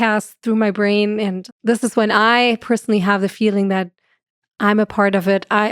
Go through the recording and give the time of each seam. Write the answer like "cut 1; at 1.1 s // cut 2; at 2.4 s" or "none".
cut 1; at 1.5 s